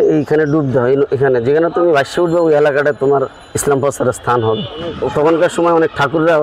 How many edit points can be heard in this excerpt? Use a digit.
1